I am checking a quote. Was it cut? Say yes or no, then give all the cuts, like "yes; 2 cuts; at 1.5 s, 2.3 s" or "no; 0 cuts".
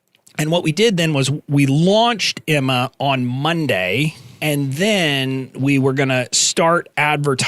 yes; 1 cut; at 4.3 s